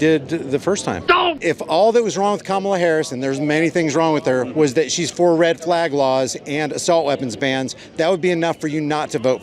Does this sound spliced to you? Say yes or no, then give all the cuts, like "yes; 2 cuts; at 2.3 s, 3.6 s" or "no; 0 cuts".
yes; 1 cut; at 1.3 s